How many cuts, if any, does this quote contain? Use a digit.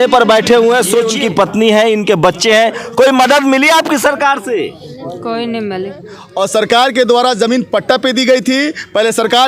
2